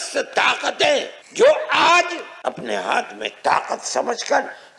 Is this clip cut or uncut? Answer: cut